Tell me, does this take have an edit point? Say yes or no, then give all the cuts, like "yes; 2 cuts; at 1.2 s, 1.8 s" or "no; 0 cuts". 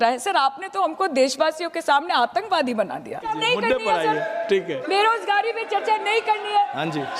yes; 1 cut; at 3.4 s